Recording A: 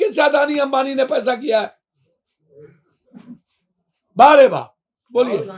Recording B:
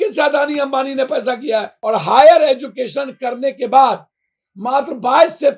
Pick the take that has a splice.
B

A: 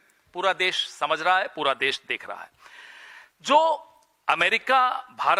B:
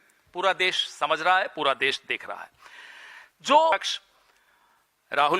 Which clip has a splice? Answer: B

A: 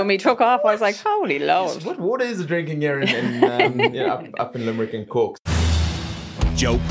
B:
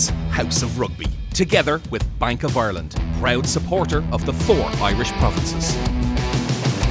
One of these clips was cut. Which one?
A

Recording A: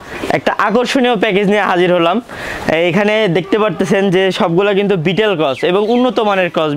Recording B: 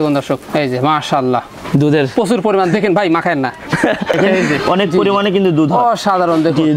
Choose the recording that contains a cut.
B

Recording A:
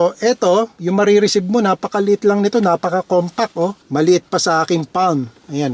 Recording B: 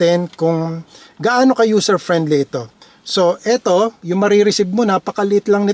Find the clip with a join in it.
A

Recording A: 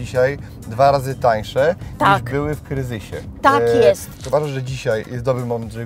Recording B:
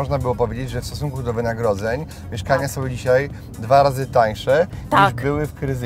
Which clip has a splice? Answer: A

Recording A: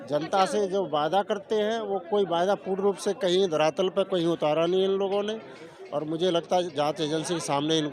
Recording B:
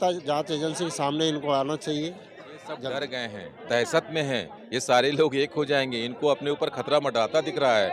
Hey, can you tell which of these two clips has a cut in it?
B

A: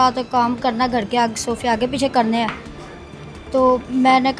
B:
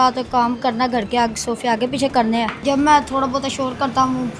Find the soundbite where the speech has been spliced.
B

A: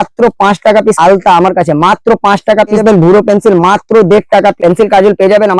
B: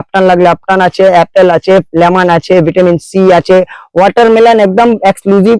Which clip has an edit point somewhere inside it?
A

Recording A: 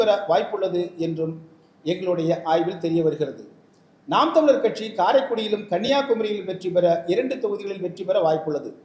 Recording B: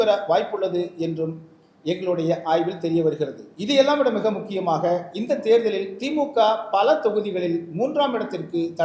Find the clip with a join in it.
B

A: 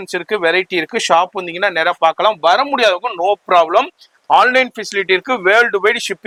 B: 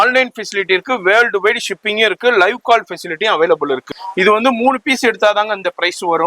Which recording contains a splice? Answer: B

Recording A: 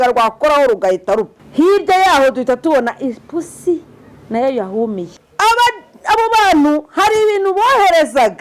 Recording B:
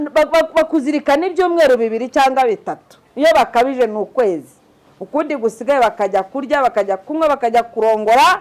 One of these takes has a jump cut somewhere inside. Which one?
A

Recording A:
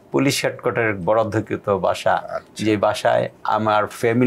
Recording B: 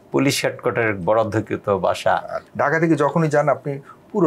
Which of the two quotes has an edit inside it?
B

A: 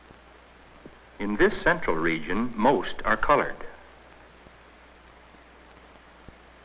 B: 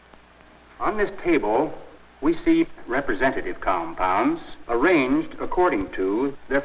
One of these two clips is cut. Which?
B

